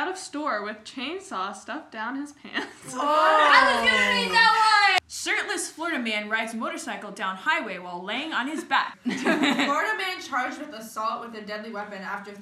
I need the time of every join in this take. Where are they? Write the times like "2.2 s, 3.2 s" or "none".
5.0 s, 9.0 s